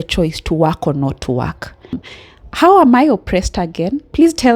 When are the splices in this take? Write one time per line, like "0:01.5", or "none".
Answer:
0:02.0